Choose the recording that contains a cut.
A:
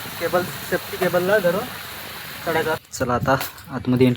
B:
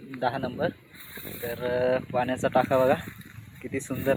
A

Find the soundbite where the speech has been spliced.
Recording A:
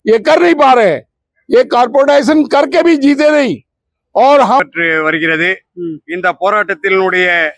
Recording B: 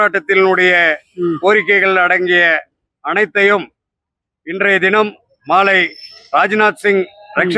A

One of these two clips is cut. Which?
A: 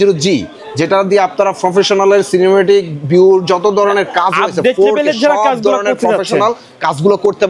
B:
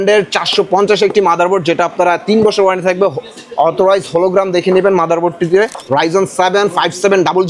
B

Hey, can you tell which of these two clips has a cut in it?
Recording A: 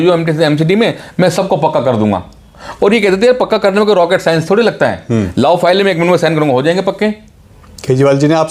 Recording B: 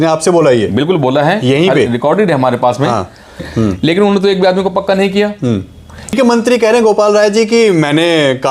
B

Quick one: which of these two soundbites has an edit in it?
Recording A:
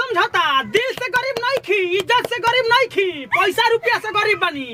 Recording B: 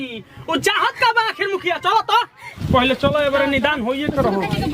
B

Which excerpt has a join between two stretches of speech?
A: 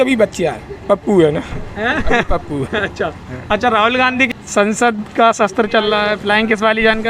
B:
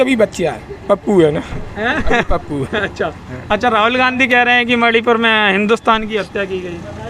A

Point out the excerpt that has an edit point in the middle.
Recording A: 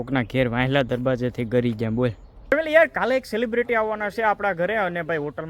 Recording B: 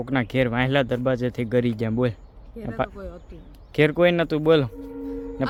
A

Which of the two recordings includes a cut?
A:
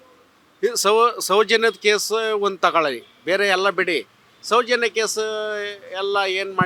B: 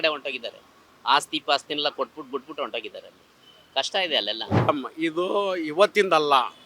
B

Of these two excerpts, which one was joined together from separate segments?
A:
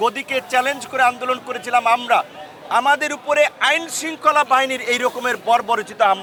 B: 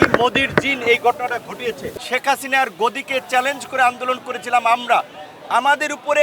B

